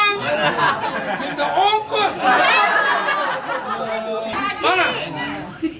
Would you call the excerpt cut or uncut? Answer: cut